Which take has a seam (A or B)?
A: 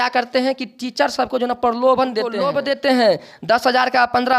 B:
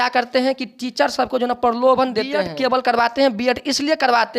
B